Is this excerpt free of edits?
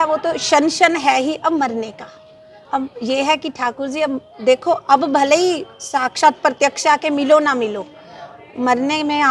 yes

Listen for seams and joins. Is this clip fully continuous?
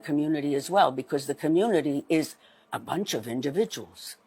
no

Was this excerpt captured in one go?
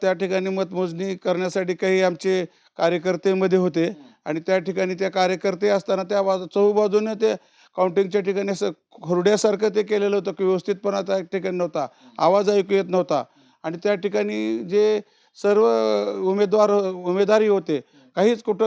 yes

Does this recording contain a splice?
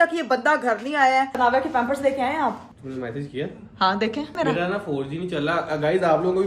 yes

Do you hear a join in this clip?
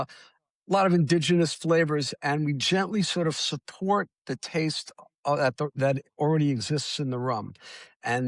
no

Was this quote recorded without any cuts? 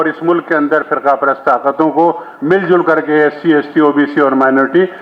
yes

